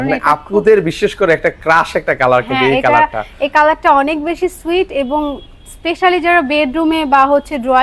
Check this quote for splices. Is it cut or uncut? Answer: uncut